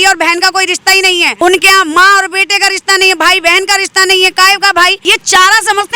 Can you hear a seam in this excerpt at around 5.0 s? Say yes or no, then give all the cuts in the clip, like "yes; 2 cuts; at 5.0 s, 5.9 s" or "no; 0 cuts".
yes; 2 cuts; at 1.3 s, 5.0 s